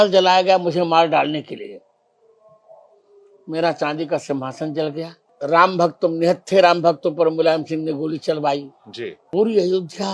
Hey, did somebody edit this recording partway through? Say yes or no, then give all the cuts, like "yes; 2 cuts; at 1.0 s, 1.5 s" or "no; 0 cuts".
yes; 2 cuts; at 5.2 s, 9.2 s